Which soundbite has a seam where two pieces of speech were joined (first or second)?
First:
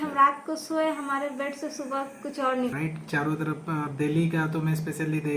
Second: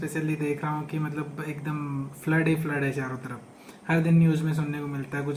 first